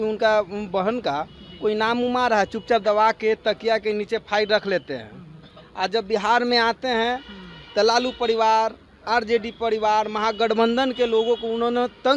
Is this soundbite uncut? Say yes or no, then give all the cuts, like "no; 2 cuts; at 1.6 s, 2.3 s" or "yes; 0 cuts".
yes; 0 cuts